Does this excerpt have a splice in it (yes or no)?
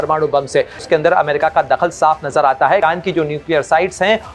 yes